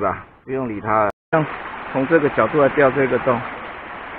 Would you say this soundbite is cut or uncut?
cut